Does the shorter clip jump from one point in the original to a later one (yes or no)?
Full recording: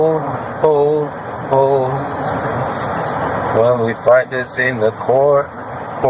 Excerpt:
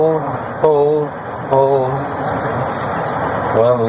no